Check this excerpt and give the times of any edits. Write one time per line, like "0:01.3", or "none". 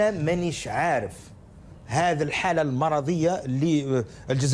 none

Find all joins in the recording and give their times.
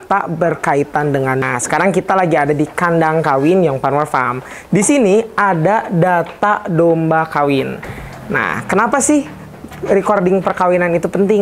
0:01.4

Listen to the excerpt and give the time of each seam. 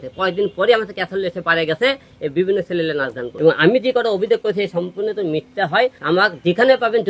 0:03.2
0:06.0

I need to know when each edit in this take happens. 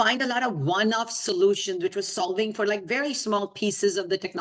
none

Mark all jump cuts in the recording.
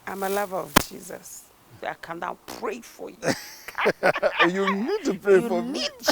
0:01.8

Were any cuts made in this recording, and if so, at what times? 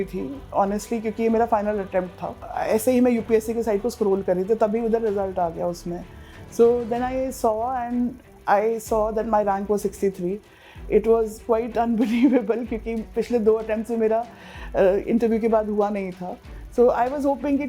0:02.5

